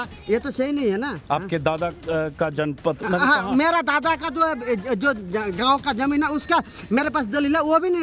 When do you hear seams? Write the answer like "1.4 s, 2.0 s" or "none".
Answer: none